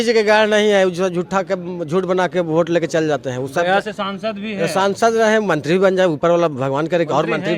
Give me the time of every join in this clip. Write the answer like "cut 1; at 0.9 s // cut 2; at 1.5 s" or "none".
none